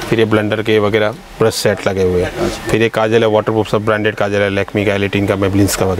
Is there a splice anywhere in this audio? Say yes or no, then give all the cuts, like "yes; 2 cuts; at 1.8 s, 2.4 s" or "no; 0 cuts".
no; 0 cuts